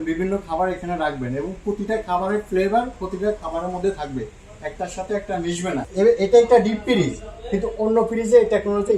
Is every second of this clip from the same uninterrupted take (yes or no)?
no